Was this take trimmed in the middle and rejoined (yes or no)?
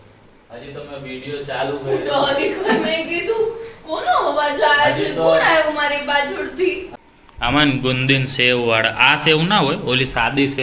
yes